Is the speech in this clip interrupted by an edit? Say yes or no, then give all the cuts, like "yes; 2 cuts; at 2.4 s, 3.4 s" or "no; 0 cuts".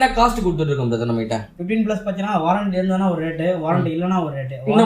no; 0 cuts